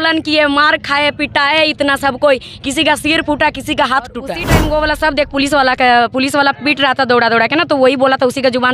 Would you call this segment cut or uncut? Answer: cut